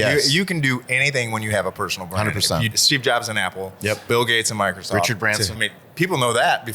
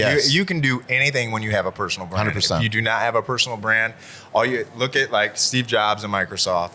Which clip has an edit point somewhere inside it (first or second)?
first